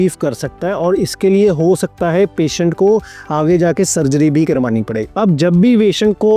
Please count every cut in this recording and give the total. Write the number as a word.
one